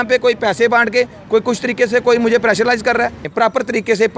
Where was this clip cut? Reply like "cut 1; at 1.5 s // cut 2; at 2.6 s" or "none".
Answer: cut 1; at 3.3 s

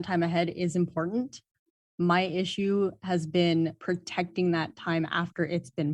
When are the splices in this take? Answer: cut 1; at 3.8 s

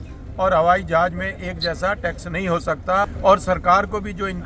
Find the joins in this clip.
cut 1; at 3.1 s

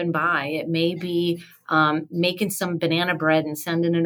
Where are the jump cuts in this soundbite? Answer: none

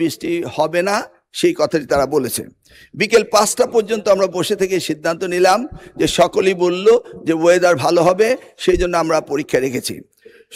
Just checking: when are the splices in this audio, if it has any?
none

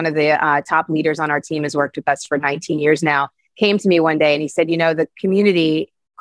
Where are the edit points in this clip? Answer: cut 1; at 5.1 s

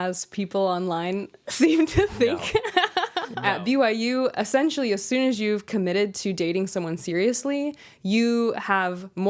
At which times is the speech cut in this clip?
cut 1; at 3.2 s

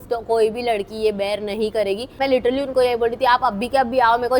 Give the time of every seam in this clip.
cut 1; at 2.2 s

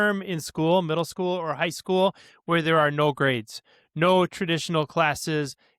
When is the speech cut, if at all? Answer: none

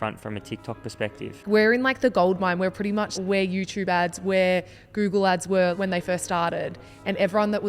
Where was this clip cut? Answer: cut 1; at 1.5 s // cut 2; at 3.1 s // cut 3; at 5.7 s

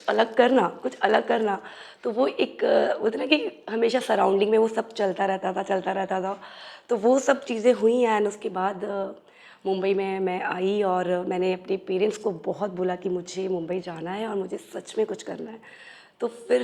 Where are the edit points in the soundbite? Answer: none

